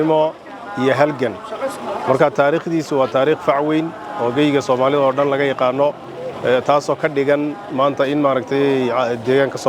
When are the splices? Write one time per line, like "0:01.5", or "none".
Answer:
none